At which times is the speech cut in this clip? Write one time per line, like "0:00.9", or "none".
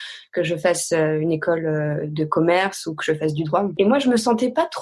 0:03.7